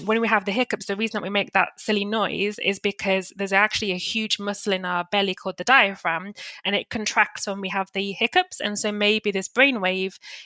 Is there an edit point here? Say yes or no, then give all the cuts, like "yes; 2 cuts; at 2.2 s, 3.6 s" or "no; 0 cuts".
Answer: no; 0 cuts